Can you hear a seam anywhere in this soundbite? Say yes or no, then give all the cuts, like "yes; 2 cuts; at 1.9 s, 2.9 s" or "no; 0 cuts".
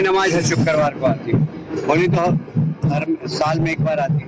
no; 0 cuts